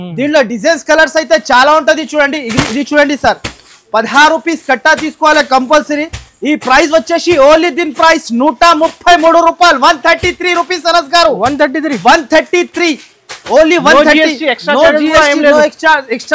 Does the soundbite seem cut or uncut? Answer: uncut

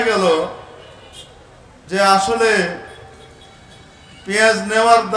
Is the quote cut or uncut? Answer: uncut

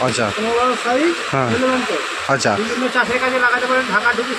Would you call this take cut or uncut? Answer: uncut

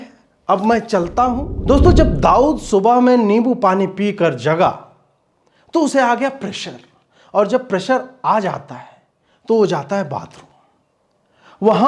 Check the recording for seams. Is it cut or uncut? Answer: cut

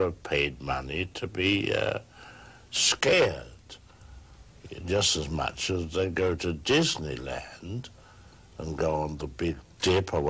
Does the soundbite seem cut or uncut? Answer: uncut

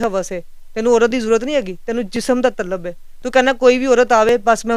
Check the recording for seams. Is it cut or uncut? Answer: uncut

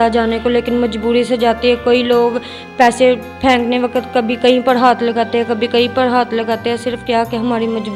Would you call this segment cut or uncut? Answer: uncut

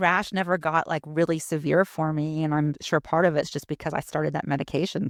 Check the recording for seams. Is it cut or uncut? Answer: uncut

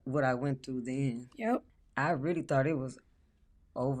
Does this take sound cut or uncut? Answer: cut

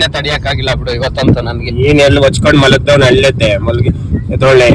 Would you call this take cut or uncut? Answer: cut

